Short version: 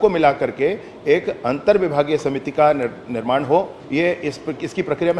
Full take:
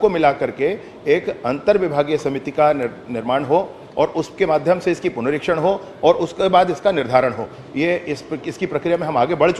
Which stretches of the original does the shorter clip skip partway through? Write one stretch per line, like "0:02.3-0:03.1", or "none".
0:03.8-0:07.6